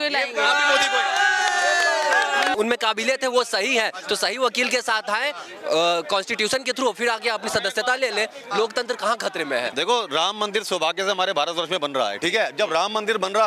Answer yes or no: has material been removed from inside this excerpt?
yes